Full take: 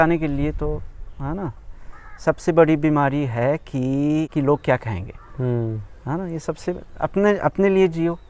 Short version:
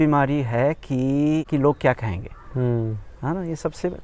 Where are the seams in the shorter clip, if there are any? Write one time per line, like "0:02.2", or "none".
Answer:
none